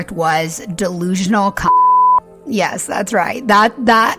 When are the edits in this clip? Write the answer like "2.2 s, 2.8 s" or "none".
none

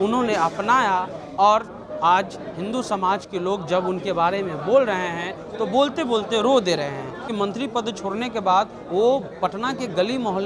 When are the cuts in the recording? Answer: 7.3 s

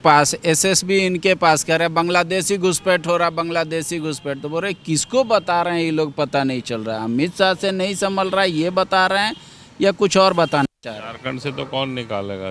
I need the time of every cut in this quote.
none

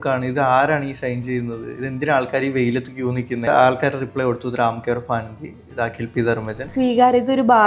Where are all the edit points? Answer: 3.5 s, 6.6 s

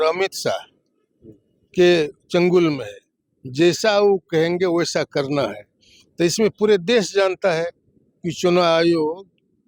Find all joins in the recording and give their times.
none

